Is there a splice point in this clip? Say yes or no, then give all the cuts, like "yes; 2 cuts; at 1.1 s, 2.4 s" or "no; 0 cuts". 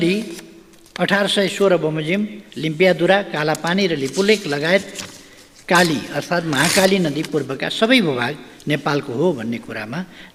no; 0 cuts